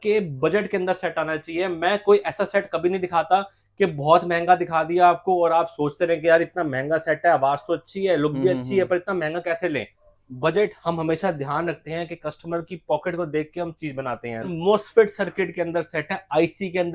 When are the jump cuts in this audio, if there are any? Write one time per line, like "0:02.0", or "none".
0:09.9
0:14.5